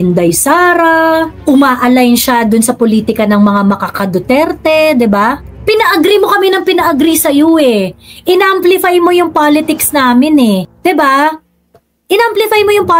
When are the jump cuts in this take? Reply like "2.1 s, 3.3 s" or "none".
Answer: none